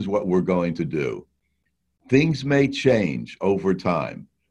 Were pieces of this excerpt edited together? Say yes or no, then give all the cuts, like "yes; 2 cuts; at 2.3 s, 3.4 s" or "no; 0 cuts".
yes; 1 cut; at 1.8 s